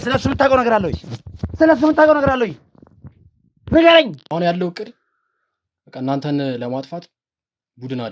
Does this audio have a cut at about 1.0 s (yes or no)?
no